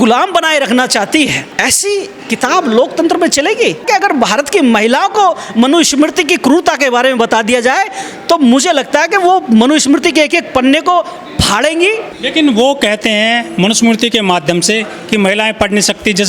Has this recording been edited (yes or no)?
no